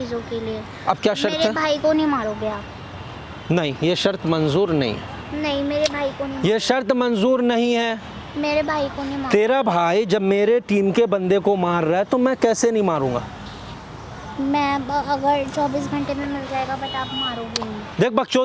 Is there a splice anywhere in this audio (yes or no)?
no